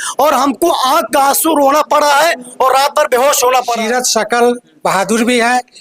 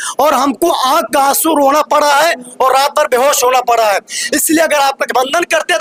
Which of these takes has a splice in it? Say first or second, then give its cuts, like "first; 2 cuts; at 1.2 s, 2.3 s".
first; 1 cut; at 3.7 s